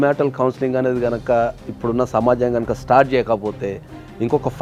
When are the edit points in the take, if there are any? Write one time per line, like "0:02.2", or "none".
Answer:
none